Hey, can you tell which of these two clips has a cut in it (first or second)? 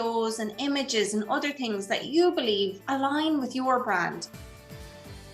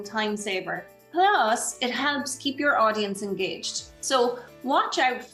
first